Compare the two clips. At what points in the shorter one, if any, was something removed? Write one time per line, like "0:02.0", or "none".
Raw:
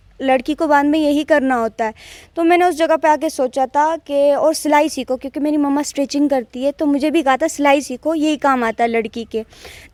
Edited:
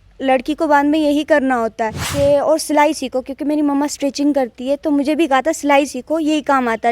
0:02.1